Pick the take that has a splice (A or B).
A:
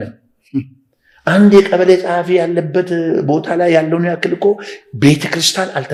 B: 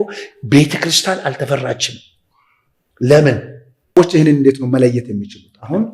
B